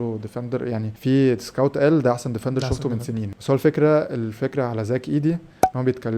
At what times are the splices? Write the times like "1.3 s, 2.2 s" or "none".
0.9 s, 3.3 s